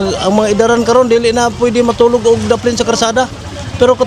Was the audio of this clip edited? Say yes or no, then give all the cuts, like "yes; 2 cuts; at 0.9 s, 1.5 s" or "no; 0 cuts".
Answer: no; 0 cuts